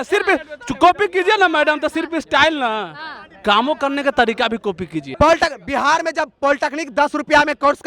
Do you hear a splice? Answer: yes; 1 cut; at 5.0 s

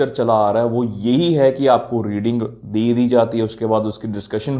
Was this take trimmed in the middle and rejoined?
no; 0 cuts

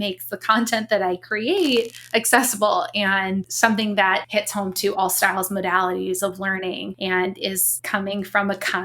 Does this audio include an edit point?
yes; 4 cuts; at 3.5 s, 4.3 s, 6.9 s, 7.7 s

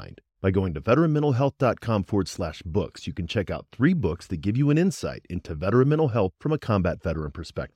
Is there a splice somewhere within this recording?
no; 0 cuts

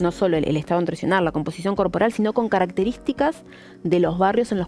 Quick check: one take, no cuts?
yes; 0 cuts

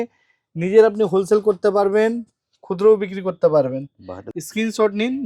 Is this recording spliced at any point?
yes; 1 cut; at 4.2 s

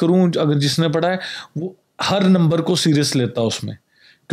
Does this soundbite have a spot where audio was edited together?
no; 0 cuts

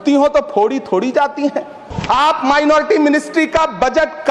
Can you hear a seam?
yes; 1 cut; at 1.9 s

